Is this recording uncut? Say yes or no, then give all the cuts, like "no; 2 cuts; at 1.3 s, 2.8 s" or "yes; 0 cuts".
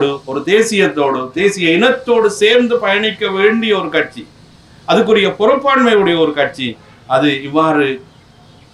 yes; 0 cuts